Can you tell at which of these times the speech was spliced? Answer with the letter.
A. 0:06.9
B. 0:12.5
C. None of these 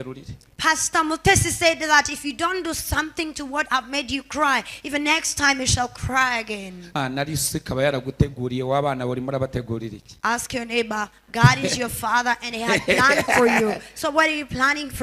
A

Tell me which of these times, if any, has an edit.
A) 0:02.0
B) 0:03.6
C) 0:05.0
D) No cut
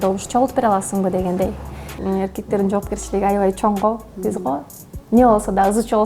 A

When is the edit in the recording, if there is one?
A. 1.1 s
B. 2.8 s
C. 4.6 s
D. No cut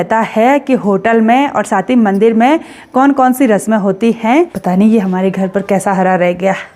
C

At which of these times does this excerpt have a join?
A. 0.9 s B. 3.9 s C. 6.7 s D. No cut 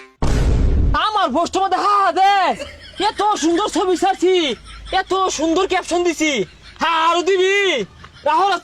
A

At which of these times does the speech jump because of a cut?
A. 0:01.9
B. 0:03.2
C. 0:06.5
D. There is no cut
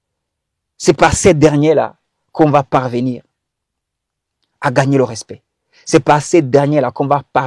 D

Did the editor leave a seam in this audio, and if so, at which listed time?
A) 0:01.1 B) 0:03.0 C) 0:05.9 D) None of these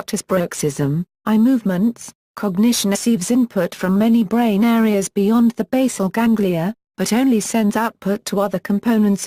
D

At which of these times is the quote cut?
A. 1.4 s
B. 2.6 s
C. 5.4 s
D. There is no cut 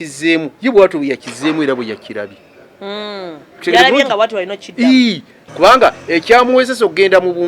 C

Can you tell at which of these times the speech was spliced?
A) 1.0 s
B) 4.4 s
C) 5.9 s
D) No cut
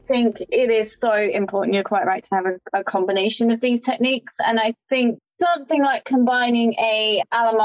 D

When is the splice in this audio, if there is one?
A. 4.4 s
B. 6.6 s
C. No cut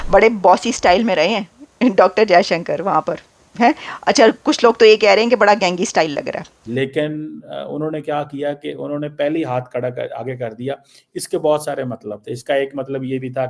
B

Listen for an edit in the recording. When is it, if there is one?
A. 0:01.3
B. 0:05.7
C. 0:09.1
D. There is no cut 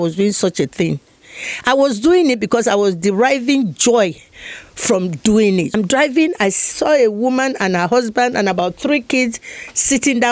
B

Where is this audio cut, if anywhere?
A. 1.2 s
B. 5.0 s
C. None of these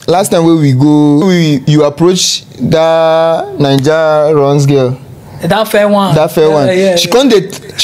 A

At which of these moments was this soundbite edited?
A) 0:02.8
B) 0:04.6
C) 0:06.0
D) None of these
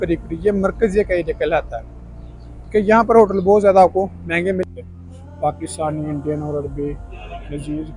B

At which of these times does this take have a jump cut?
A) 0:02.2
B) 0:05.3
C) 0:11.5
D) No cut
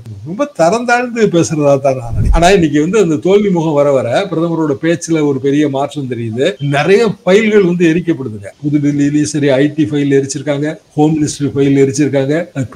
A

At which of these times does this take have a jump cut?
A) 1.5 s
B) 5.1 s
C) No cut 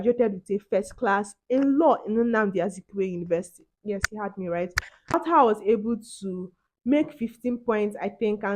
B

